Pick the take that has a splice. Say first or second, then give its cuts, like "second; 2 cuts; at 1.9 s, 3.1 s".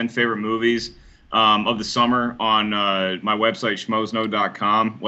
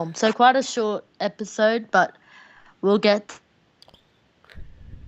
second; 1 cut; at 1.9 s